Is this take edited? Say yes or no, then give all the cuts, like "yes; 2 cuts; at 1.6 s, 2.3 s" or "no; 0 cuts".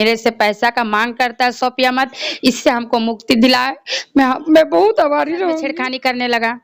yes; 1 cut; at 5.7 s